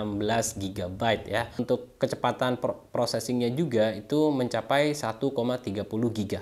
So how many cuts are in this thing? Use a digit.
1